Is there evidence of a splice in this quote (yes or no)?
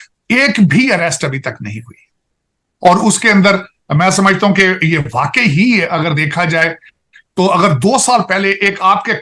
no